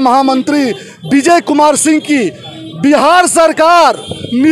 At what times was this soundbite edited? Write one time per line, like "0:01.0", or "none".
none